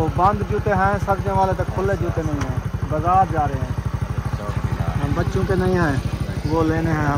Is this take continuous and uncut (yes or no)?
yes